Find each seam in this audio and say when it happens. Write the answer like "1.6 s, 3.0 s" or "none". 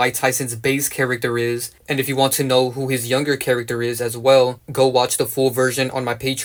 none